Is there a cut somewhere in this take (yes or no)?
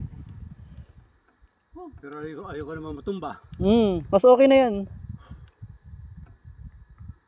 no